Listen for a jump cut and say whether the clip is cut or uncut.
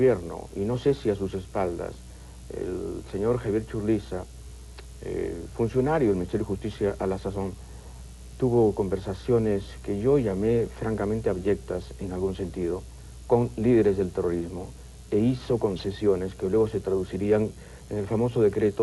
uncut